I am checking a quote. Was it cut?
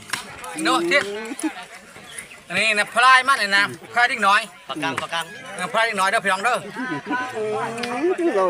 no; 0 cuts

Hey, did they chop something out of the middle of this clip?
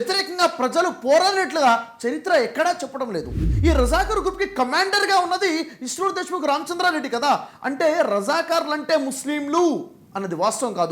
yes; 1 cut; at 3.4 s

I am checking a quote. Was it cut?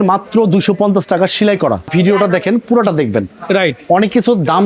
yes; 1 cut; at 1.9 s

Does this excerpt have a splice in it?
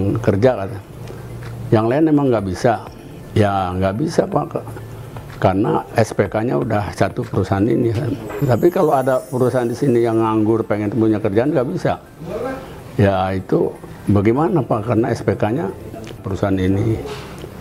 yes; 2 cuts; at 8.3 s, 16.2 s

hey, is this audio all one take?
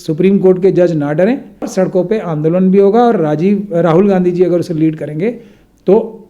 no; 1 cut; at 1.7 s

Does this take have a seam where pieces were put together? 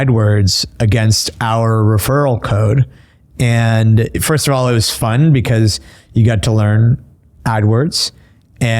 yes; 1 cut; at 4.2 s

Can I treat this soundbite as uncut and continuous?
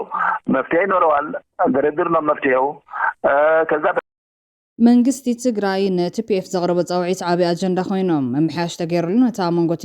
no; 1 cut; at 4.3 s

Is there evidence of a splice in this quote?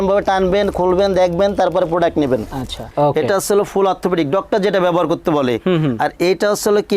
yes; 1 cut; at 2.8 s

